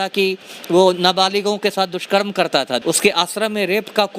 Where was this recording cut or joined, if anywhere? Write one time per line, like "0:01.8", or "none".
0:02.8